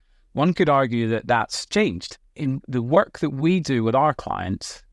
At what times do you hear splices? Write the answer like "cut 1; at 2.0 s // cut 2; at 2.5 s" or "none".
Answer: cut 1; at 2.2 s